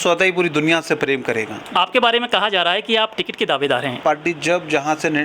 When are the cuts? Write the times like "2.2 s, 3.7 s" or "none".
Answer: 1.6 s, 4.0 s